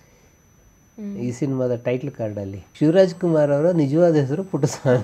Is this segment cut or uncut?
cut